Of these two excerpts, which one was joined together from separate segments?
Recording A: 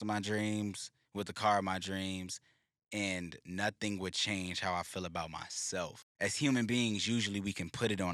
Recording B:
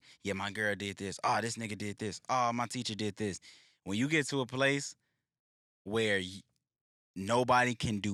A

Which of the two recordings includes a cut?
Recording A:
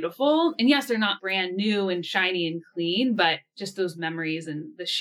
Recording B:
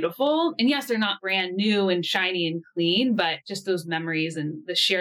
B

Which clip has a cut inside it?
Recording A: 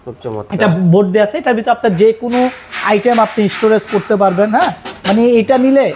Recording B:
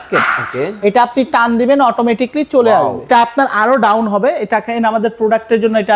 B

